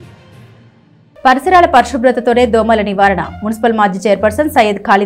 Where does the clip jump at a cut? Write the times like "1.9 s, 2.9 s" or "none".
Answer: none